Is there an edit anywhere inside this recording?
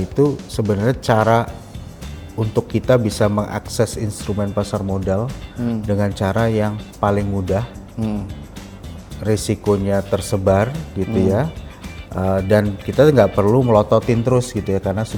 no; 0 cuts

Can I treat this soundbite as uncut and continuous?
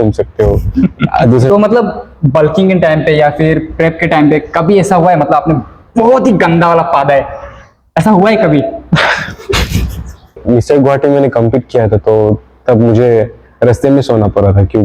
no; 2 cuts; at 1.5 s, 10.4 s

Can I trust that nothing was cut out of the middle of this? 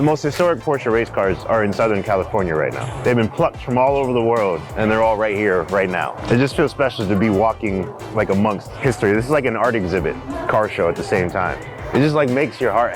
no; 6 cuts; at 2.9 s, 4.7 s, 6.2 s, 8.7 s, 10.3 s, 11.7 s

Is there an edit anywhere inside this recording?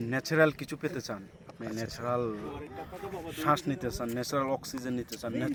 no; 0 cuts

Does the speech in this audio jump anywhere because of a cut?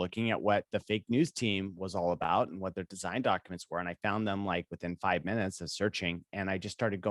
no; 0 cuts

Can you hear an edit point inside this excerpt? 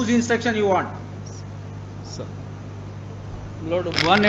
no; 0 cuts

